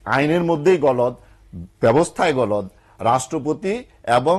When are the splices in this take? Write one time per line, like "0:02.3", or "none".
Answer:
none